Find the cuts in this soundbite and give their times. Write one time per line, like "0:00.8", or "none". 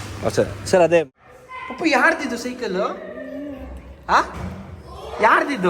0:01.1